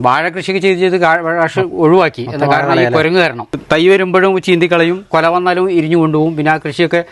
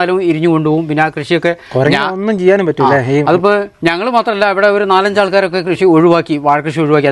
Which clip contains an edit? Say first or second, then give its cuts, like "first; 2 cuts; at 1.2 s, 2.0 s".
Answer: first; 1 cut; at 3.5 s